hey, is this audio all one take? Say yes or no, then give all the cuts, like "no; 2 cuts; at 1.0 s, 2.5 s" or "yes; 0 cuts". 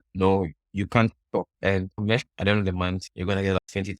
no; 1 cut; at 2.3 s